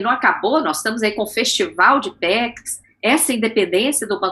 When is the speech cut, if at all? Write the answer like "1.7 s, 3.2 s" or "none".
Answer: none